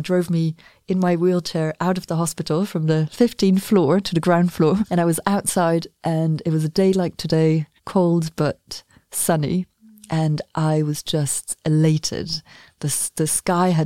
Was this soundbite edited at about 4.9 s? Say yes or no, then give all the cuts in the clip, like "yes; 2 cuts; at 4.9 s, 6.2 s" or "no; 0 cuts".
yes; 2 cuts; at 4.9 s, 7.8 s